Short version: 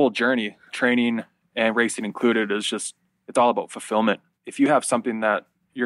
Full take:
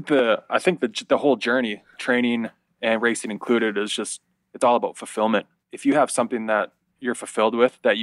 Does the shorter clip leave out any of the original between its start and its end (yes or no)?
no